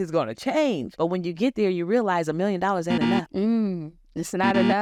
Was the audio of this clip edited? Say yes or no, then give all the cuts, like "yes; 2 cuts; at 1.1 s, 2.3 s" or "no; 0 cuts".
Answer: no; 0 cuts